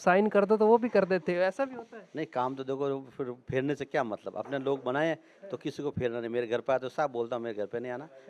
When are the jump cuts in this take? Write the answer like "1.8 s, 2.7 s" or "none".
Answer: none